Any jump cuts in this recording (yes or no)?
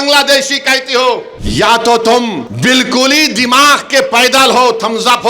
yes